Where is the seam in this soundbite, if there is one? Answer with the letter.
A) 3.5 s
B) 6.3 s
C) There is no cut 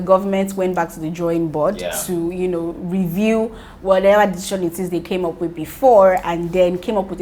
C